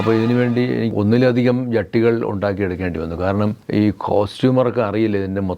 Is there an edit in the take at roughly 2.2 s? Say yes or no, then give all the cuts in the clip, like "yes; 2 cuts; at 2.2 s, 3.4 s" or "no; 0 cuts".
no; 2 cuts; at 0.9 s, 3.6 s